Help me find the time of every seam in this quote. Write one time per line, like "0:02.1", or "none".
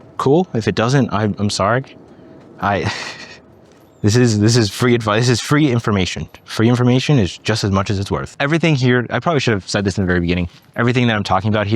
0:08.3